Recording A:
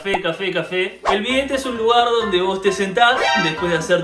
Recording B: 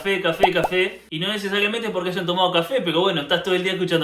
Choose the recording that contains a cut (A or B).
A